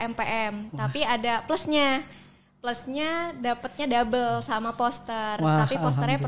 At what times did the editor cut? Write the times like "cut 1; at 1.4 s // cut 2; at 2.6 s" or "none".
none